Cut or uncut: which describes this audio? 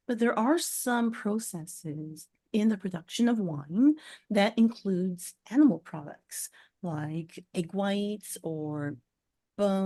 uncut